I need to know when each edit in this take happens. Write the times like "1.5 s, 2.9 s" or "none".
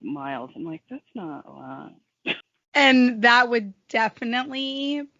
3.4 s